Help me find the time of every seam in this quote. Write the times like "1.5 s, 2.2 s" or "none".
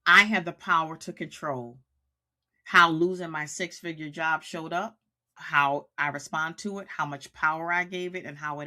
none